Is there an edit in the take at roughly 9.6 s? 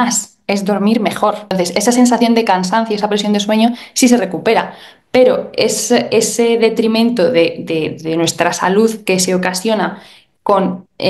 no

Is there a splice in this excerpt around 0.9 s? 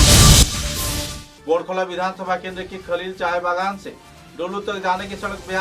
yes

